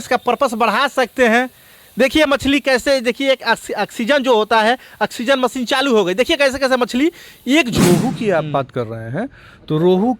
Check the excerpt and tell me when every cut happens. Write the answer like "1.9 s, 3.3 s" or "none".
7.8 s